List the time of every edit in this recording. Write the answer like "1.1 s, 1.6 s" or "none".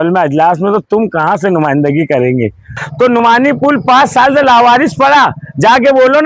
2.8 s